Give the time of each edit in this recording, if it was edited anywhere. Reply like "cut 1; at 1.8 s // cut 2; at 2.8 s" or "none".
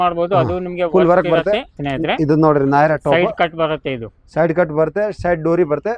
cut 1; at 1.8 s